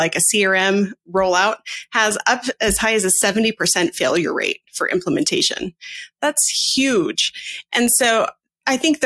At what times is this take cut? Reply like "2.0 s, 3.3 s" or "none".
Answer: 1.0 s